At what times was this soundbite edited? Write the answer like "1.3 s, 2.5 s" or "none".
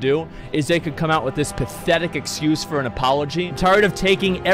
3.5 s